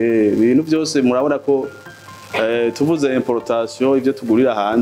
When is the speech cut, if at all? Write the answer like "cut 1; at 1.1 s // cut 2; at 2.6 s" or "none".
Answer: none